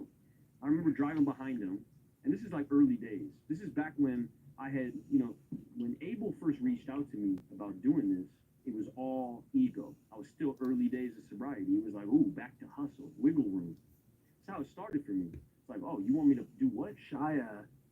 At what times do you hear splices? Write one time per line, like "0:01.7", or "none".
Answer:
0:17.0

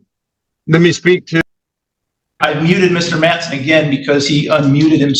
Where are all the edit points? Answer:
none

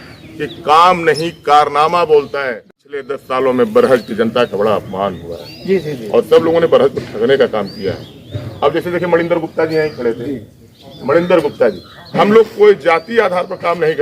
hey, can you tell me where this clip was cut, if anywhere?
0:02.6

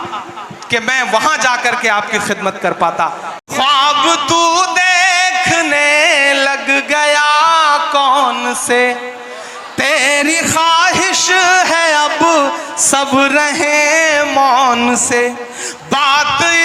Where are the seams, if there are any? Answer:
0:03.4

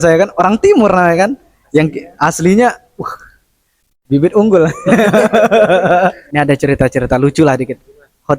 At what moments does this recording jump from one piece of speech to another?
0:06.2

